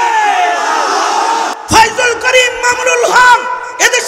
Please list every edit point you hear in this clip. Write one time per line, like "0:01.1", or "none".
0:01.6